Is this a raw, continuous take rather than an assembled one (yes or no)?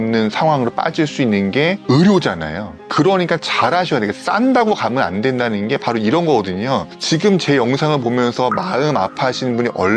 yes